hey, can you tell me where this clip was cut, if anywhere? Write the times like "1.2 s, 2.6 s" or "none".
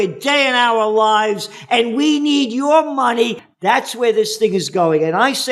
3.4 s